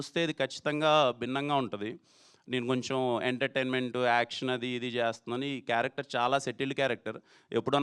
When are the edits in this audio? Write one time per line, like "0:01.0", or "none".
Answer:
none